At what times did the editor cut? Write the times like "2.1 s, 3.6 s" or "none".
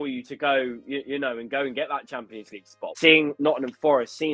2.8 s